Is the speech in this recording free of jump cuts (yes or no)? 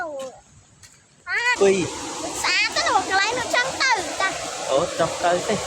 no